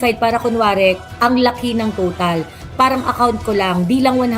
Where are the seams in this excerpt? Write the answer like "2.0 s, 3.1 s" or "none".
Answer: 1.1 s